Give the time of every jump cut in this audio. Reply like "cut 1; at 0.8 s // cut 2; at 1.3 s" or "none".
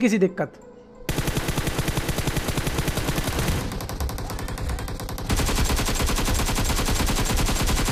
none